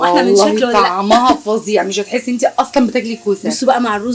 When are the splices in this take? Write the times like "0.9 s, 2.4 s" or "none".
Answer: none